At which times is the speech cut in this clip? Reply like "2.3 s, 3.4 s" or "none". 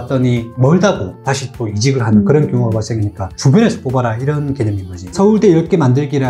5.1 s